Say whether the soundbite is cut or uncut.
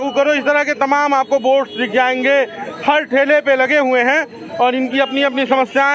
uncut